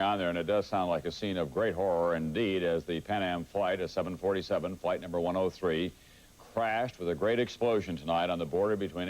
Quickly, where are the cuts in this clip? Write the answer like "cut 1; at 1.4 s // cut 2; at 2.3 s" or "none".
cut 1; at 6.4 s